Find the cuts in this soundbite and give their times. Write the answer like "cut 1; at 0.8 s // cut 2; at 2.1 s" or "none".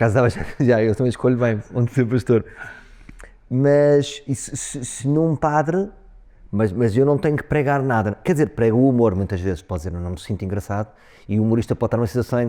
none